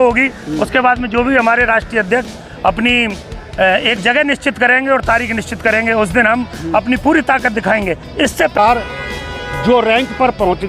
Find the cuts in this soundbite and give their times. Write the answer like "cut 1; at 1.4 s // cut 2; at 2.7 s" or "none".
cut 1; at 8.6 s